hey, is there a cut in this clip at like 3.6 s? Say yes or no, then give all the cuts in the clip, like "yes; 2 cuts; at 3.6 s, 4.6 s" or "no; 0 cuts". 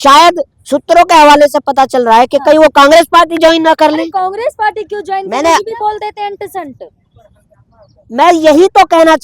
no; 1 cut; at 5.3 s